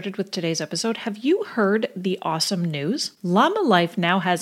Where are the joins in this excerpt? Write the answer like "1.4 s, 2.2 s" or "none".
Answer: none